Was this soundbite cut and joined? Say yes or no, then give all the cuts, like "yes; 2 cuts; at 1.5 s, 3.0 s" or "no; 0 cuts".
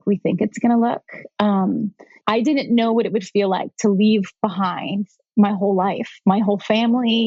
yes; 1 cut; at 2.2 s